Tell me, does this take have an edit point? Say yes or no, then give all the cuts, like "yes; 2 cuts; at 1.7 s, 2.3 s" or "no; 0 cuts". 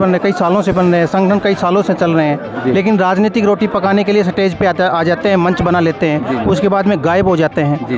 no; 0 cuts